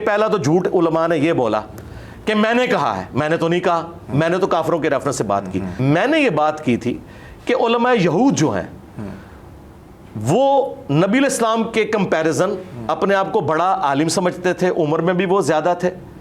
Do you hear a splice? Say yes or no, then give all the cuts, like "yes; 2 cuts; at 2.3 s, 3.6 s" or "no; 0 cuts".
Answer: yes; 1 cut; at 5.7 s